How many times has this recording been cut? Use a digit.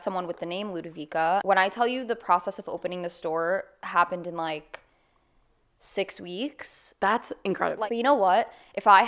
2